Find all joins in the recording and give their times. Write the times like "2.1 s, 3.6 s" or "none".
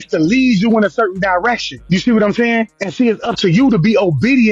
1.7 s, 2.8 s